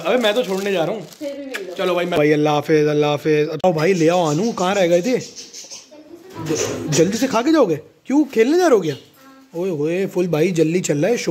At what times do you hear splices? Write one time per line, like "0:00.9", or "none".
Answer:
0:02.2
0:03.6